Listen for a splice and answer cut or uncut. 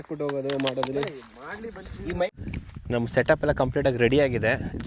cut